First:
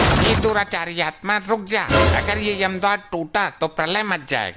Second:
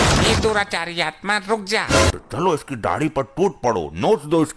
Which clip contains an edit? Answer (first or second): second